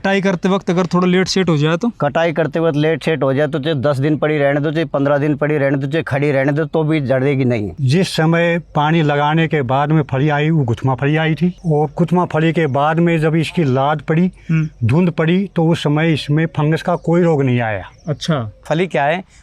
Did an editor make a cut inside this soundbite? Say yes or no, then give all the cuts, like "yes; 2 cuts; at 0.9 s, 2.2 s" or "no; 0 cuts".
yes; 3 cuts; at 7.8 s, 11.6 s, 18.6 s